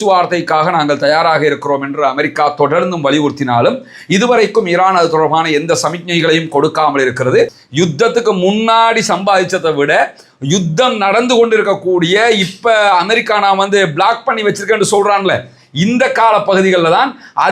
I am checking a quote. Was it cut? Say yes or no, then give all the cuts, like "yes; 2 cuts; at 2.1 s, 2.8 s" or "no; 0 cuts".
yes; 1 cut; at 7.6 s